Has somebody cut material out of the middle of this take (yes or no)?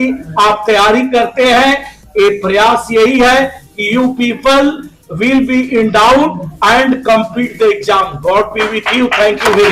no